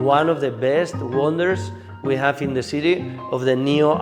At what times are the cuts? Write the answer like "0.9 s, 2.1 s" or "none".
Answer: none

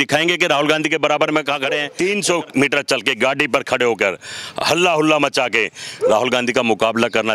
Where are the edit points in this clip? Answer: 1.9 s

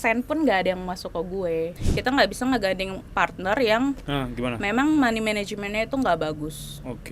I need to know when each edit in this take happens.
1.8 s

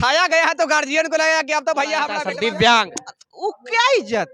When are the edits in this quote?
2.2 s

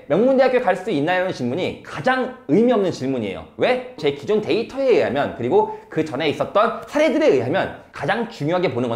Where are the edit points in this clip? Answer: 3.9 s, 7.9 s

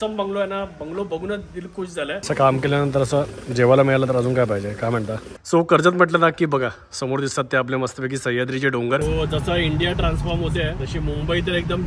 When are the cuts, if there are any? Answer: 2.2 s, 5.3 s, 9.0 s

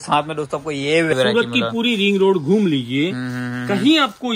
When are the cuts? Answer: 1.1 s

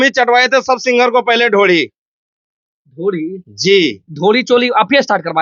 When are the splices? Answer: none

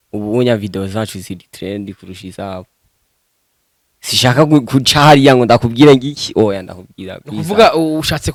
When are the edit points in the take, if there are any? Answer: none

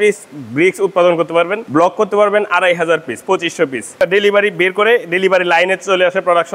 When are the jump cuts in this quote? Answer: 1.6 s, 4.0 s

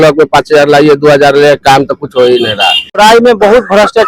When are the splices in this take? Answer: 3.0 s

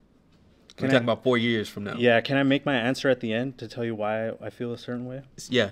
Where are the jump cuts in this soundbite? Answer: none

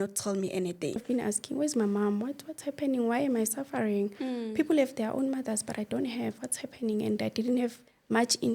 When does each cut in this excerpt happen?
1.0 s

